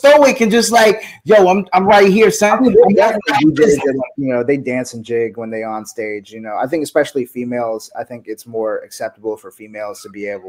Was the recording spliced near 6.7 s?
no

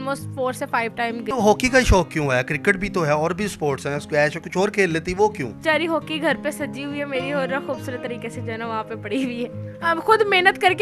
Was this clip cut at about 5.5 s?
yes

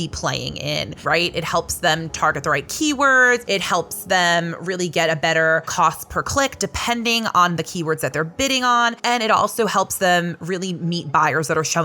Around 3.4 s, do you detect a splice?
yes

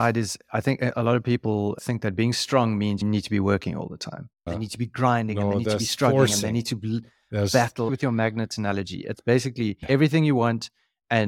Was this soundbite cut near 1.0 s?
no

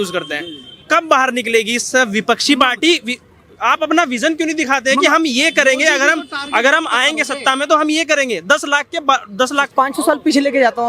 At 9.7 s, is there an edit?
yes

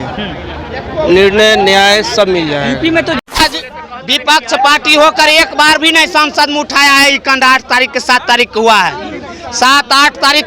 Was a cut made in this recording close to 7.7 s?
no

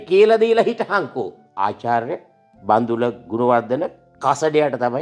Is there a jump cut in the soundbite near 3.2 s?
no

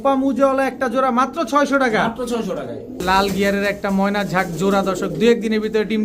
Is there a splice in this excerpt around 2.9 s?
yes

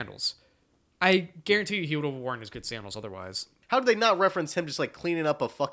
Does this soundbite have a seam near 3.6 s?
yes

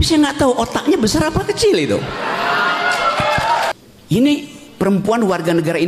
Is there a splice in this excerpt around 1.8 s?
no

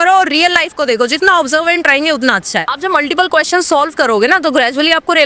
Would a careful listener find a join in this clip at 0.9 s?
no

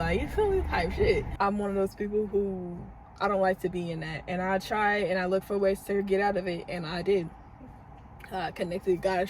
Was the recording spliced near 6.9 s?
no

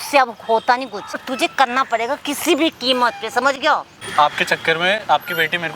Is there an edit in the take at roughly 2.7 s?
no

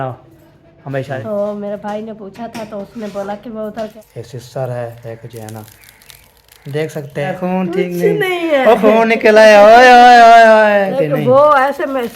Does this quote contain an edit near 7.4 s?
yes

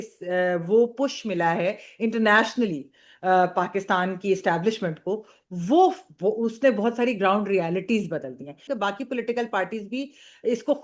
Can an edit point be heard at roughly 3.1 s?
no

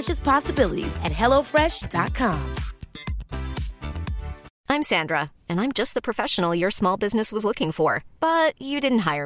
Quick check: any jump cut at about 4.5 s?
yes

